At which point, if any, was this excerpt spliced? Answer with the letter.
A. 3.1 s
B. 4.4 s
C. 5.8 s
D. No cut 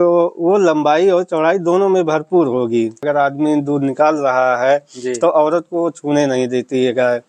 A